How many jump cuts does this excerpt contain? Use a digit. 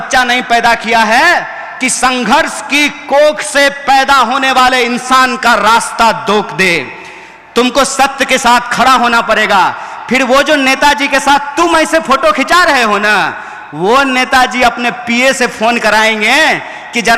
0